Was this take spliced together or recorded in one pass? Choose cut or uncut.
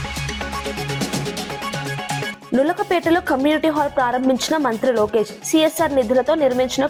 uncut